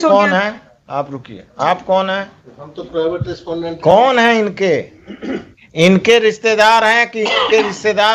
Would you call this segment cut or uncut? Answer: uncut